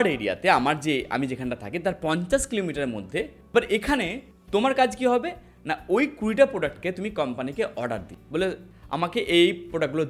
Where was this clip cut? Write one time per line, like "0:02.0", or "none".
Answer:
0:03.4